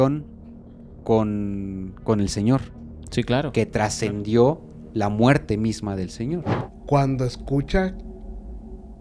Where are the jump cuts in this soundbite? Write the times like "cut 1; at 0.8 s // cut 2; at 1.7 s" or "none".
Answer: cut 1; at 6.6 s

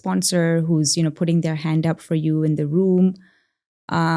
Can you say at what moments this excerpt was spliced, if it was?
none

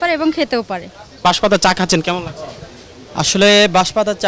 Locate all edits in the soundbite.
none

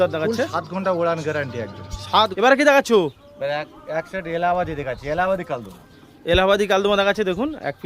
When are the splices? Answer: cut 1; at 2.3 s

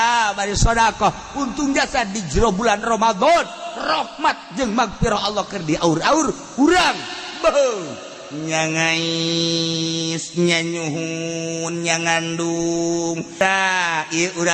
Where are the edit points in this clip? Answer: cut 1; at 13.4 s

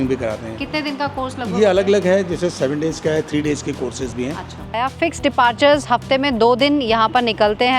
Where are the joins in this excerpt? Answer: cut 1; at 4.8 s

